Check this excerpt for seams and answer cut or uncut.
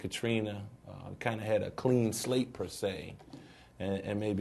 uncut